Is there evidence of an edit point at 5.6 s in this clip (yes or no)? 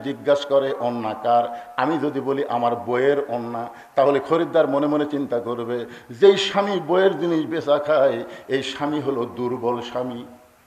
no